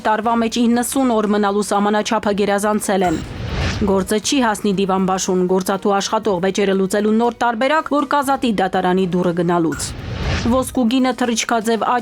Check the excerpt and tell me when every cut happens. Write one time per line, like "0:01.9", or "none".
none